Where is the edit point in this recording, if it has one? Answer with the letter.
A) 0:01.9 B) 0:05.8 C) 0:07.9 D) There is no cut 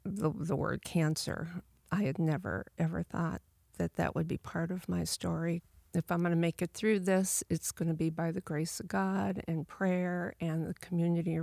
B